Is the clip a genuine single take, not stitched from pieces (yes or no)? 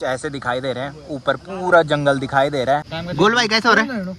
no